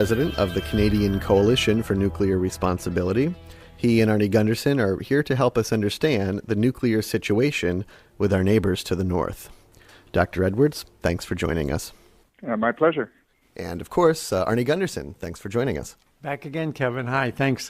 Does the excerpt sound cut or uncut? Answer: uncut